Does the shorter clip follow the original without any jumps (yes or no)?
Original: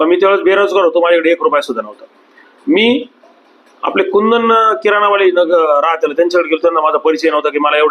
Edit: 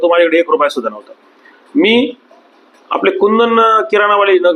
yes